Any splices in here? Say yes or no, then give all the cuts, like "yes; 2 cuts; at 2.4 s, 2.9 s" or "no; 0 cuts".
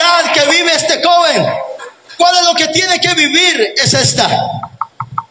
no; 0 cuts